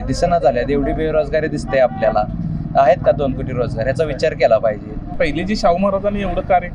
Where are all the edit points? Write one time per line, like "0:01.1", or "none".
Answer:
0:05.1